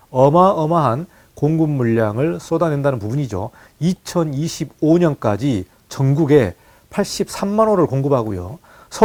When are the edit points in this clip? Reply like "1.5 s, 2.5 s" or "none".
none

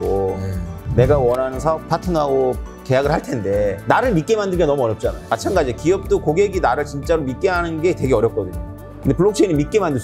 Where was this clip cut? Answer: 5.2 s

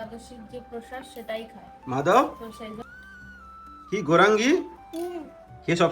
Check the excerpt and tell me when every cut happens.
1.7 s

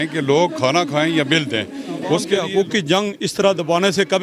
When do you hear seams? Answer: 2.5 s

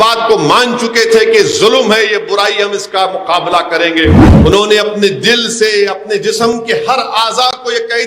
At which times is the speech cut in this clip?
4.3 s

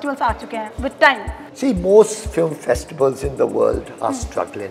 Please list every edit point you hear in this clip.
1.4 s

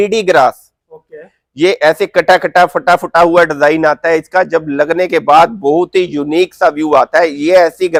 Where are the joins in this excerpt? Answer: none

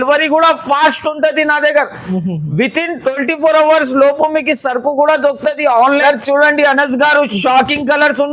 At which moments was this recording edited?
6.0 s

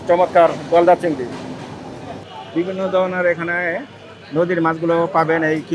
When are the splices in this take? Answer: 2.3 s

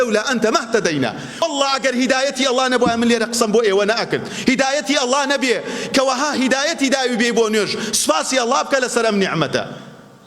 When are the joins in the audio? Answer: 1.4 s

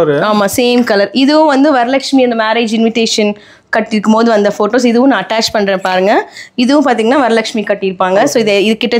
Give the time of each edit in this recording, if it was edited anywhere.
none

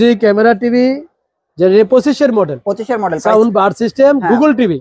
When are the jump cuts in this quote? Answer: none

